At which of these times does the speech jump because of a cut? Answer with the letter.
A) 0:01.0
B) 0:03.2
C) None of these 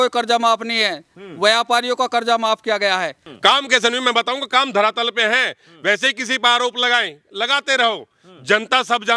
B